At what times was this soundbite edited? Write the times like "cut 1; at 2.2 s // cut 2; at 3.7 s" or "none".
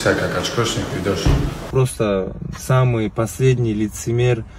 cut 1; at 1.7 s